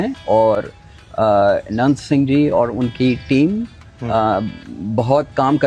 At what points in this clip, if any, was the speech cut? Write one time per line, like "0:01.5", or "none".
none